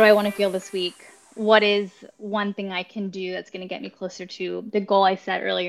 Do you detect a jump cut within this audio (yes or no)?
no